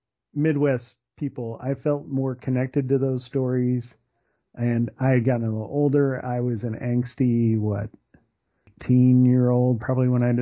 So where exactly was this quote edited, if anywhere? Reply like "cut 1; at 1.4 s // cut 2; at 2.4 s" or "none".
cut 1; at 8.7 s

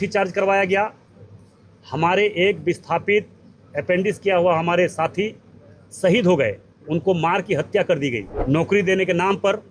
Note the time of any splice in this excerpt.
cut 1; at 8.3 s

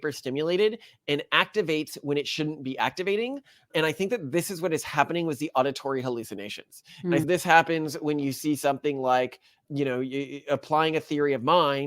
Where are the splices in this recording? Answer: cut 1; at 7.2 s

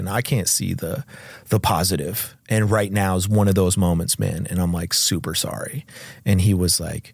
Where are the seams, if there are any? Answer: none

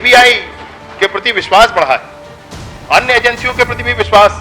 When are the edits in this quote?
none

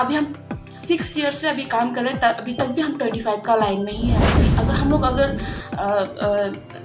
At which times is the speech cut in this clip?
cut 1; at 4.5 s

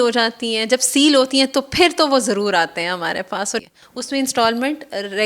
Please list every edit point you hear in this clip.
cut 1; at 3.6 s

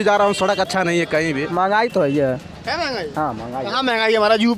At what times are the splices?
cut 1; at 1.5 s

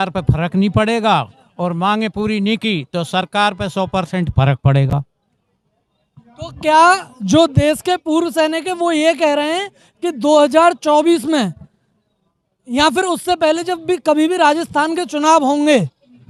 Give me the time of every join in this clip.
none

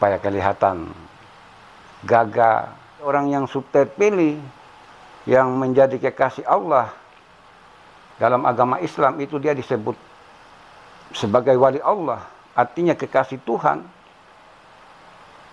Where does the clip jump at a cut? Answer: cut 1; at 3.1 s

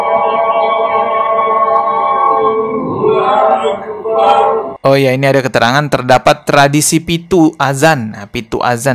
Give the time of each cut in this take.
cut 1; at 4.7 s

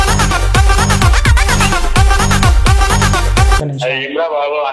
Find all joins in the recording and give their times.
cut 1; at 3.6 s

